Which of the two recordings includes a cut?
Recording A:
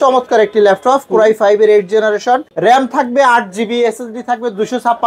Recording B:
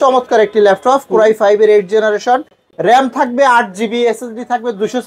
A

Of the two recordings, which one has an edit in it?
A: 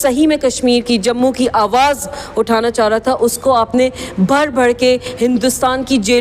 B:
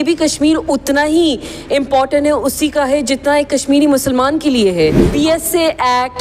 B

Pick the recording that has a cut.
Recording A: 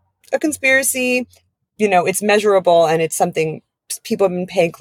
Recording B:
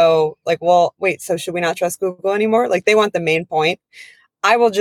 A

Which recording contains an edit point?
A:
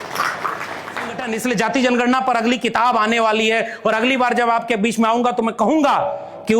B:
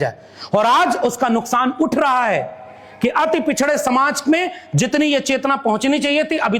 A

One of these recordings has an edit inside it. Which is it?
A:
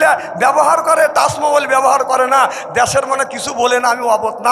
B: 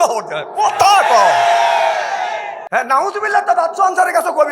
B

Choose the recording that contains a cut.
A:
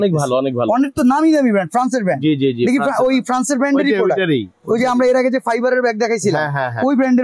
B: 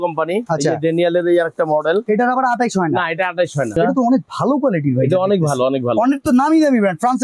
B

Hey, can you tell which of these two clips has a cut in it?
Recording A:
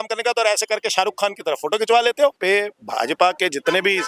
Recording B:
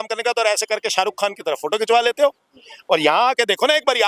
A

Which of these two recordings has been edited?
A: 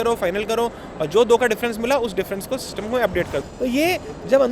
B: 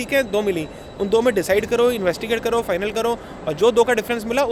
A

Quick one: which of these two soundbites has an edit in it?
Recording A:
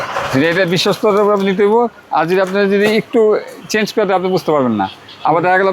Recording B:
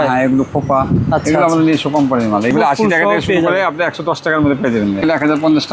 B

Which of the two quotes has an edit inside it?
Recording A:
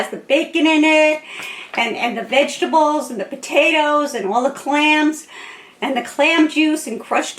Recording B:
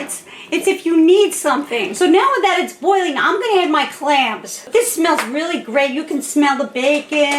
B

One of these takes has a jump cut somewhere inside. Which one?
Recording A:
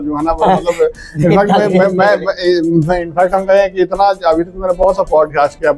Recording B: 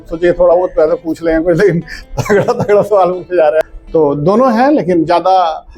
B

